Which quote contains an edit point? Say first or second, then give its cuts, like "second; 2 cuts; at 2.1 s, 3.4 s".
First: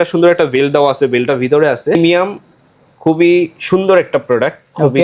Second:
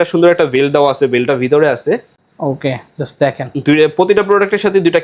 first; 1 cut; at 2.0 s